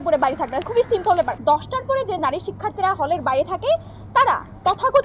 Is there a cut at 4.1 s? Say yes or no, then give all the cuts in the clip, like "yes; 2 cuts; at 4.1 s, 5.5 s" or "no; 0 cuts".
no; 1 cut; at 1.3 s